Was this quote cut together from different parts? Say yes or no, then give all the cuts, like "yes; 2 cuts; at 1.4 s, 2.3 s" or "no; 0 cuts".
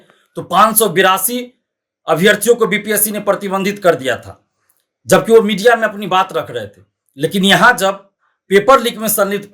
no; 0 cuts